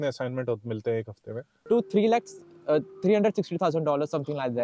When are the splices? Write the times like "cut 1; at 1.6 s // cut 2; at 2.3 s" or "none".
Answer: cut 1; at 1.6 s